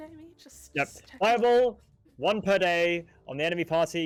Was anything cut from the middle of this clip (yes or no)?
no